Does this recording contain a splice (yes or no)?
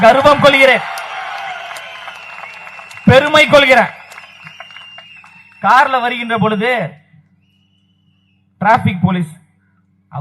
no